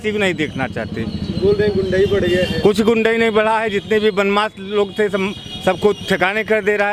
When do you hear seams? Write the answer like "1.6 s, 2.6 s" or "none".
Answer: none